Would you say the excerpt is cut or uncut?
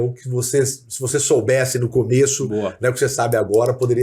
uncut